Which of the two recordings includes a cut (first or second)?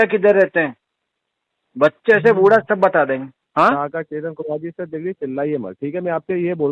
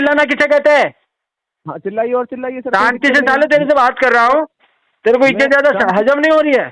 first